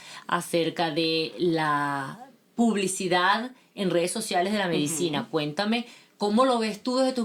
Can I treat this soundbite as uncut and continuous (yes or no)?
yes